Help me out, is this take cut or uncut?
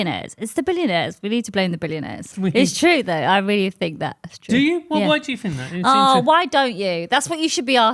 cut